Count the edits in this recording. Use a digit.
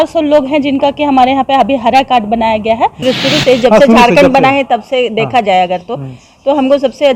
1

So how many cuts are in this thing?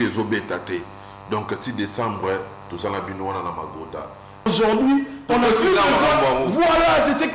1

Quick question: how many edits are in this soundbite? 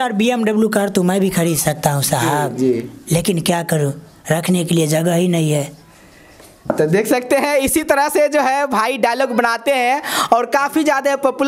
0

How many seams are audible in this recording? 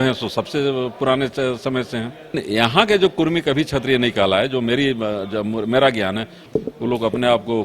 2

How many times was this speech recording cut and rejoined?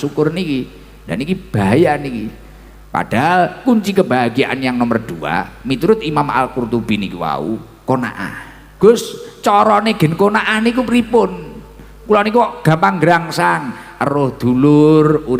1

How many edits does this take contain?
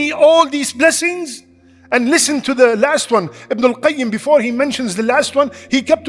0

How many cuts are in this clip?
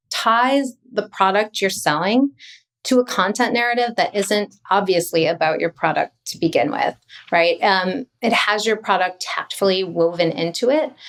0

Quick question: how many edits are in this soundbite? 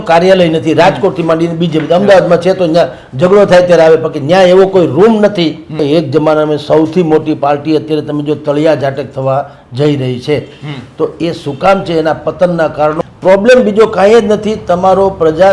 2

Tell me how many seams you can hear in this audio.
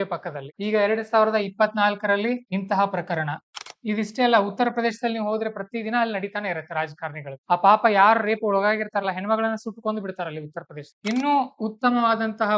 1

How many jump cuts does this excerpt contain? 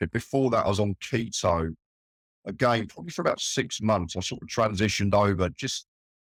0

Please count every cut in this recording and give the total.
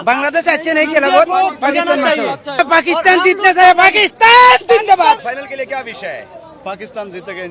1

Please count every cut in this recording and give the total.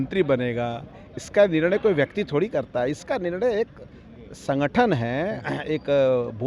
0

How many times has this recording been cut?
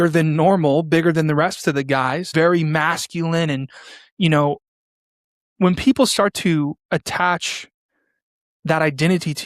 2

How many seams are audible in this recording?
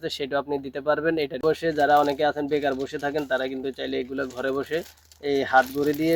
1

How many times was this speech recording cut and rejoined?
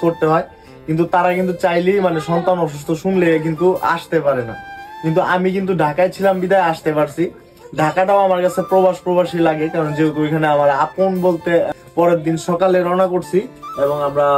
1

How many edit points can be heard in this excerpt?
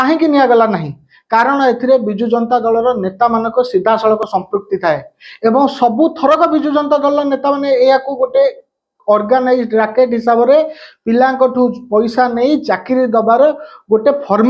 0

